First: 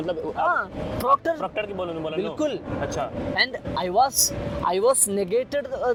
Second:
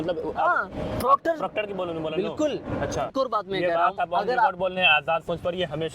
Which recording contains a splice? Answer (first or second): second